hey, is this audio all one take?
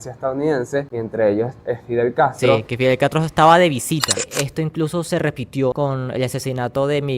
no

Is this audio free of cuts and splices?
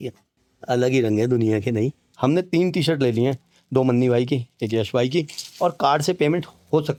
yes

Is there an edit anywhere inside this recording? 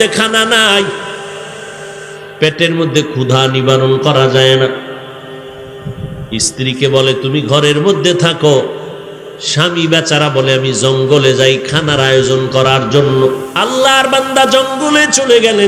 yes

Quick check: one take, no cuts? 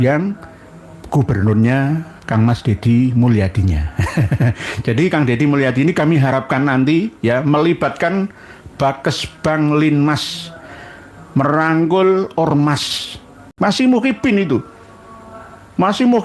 no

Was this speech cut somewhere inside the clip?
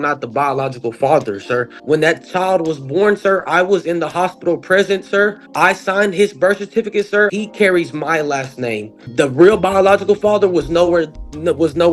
yes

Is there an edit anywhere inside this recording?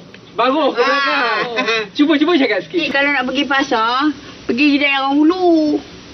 yes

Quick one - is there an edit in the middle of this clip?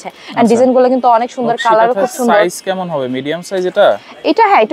no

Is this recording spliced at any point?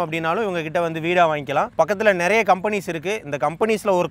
no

